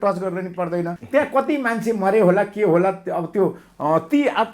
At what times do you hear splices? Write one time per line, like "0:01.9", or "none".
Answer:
0:01.0